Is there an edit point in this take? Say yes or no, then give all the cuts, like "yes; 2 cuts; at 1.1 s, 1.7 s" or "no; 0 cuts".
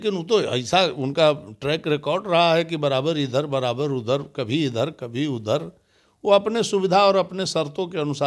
no; 0 cuts